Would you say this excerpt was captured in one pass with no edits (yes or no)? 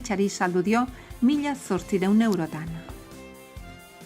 yes